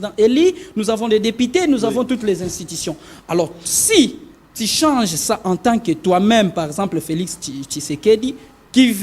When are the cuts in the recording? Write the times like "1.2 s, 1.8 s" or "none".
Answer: none